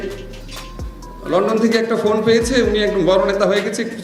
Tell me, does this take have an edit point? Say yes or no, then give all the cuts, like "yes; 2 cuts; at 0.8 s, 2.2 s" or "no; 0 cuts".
no; 0 cuts